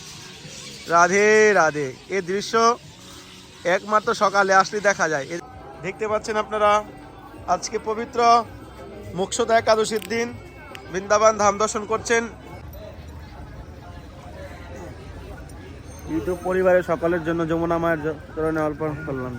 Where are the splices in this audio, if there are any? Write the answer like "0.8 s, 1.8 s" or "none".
5.4 s, 12.6 s